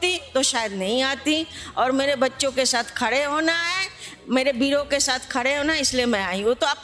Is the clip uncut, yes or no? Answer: yes